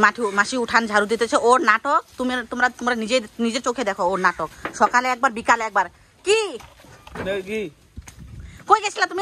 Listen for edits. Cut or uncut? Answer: uncut